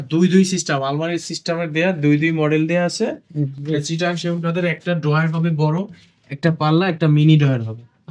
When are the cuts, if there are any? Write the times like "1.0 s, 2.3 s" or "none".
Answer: none